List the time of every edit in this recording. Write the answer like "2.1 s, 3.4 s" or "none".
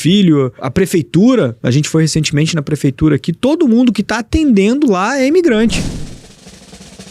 5.8 s